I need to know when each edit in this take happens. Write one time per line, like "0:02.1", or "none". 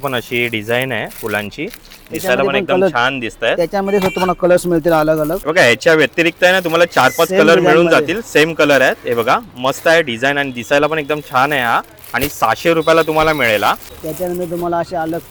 none